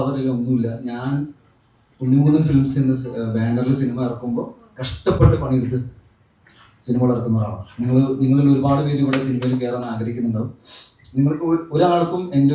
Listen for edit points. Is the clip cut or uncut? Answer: uncut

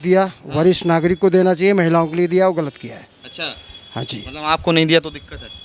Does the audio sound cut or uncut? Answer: uncut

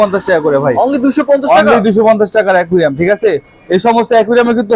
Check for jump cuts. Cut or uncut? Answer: uncut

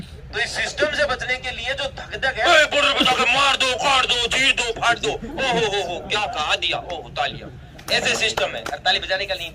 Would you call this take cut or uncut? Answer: cut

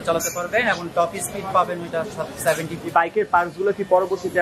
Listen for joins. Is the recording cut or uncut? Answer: cut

